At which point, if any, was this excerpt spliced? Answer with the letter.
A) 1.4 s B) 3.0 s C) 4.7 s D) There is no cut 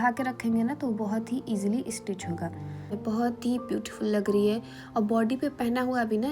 B